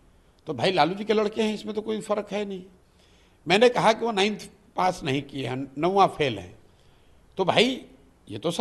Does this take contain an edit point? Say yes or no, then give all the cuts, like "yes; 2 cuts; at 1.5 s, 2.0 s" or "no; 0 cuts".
no; 0 cuts